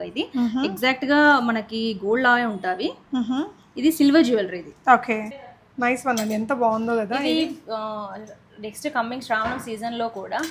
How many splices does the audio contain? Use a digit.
1